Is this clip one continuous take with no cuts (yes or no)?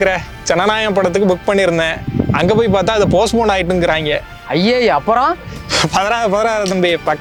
yes